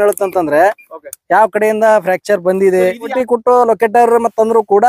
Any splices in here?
yes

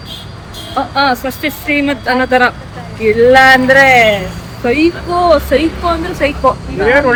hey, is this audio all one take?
yes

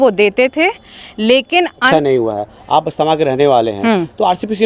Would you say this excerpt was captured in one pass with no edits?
no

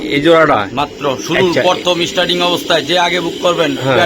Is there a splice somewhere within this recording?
no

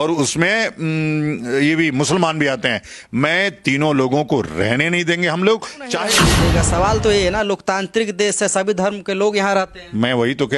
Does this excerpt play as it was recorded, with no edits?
no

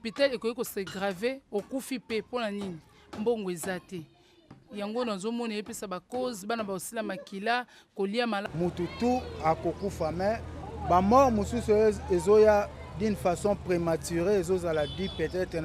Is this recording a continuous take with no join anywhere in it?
no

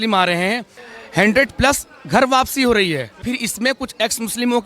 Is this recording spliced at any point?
yes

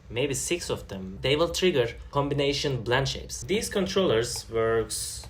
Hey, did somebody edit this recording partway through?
yes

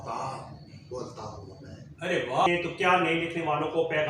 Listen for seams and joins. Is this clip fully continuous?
no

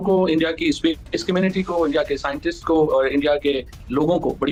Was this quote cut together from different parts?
no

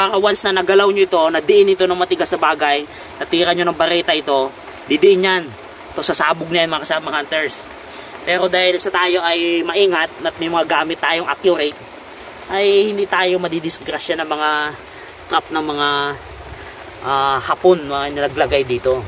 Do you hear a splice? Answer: no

